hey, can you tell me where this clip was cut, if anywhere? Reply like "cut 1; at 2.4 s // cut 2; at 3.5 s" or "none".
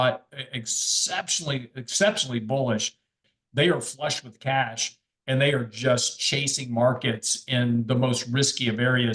cut 1; at 3.3 s